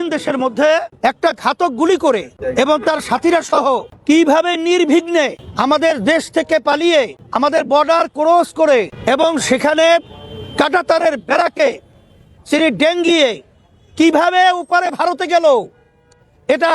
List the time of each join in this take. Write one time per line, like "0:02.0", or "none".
0:00.9
0:02.4
0:03.9
0:05.4
0:07.2
0:08.9